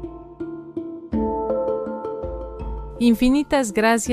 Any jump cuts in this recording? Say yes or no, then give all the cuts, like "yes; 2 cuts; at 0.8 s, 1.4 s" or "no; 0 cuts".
yes; 1 cut; at 2.9 s